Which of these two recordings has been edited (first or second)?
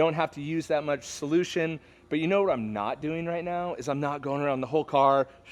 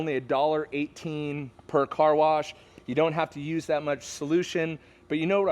second